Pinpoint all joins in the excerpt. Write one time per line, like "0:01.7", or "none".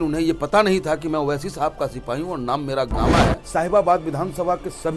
0:03.4